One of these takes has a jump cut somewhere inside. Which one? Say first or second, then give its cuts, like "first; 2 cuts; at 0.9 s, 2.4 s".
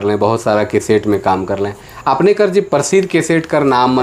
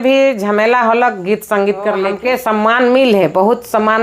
second; 1 cut; at 2.1 s